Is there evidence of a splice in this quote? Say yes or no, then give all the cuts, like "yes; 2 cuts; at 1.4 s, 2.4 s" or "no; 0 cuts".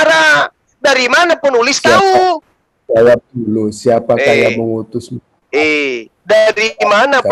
no; 0 cuts